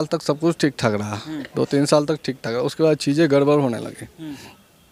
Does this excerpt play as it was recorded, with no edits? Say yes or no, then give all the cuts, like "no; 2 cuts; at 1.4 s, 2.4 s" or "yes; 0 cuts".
yes; 0 cuts